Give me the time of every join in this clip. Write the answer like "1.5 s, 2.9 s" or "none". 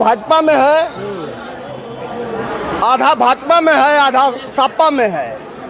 none